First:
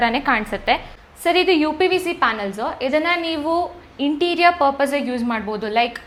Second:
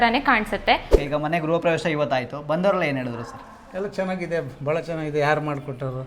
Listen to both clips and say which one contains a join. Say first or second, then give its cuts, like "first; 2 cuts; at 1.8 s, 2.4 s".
second; 1 cut; at 0.9 s